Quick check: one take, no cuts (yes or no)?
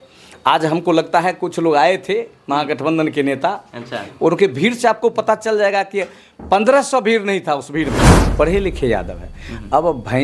no